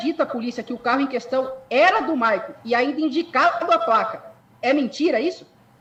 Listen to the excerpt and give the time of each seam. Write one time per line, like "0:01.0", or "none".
none